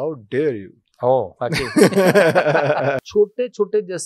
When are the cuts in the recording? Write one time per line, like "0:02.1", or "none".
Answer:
0:03.0

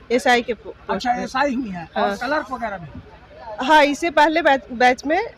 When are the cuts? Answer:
none

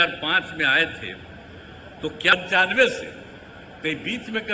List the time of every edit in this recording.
0:02.3

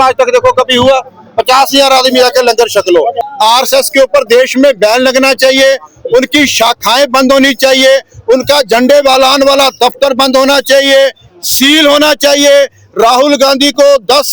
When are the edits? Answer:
0:03.2

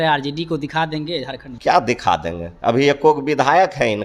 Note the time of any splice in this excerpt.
0:01.4

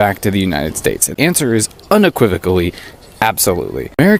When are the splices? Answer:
none

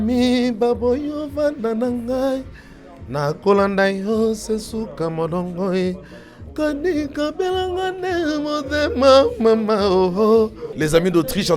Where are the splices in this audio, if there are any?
0:10.6

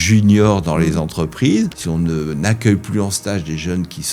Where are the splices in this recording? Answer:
0:01.8

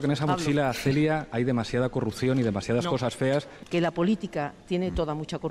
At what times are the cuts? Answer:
0:03.5

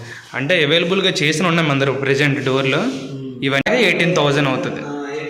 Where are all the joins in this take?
0:03.6

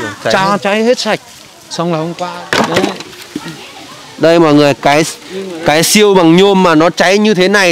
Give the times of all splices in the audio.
0:02.2

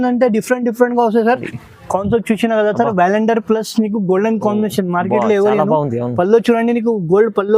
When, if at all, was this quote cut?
0:01.5

